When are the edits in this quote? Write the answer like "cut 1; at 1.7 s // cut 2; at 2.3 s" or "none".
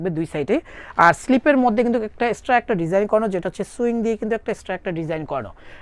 none